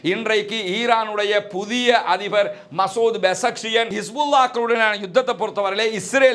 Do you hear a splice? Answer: yes; 1 cut; at 4.0 s

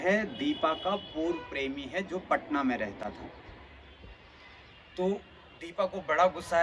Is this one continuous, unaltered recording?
yes; 0 cuts

